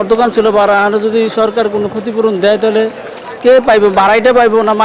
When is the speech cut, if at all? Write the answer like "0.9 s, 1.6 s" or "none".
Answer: none